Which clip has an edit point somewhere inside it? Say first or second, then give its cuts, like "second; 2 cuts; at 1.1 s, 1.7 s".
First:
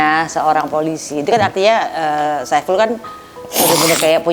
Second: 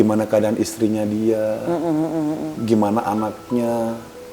second; 1 cut; at 2.5 s